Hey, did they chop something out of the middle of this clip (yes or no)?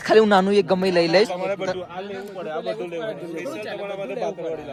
no